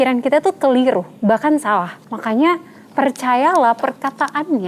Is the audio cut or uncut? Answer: cut